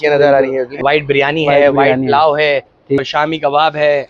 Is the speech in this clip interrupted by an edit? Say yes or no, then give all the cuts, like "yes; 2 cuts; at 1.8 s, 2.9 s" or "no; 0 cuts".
yes; 2 cuts; at 0.8 s, 3.0 s